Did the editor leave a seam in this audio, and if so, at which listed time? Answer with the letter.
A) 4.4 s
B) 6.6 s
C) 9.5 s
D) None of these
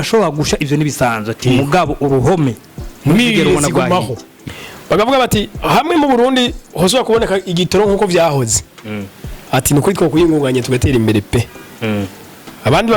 A